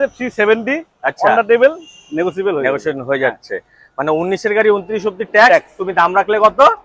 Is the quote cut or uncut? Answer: uncut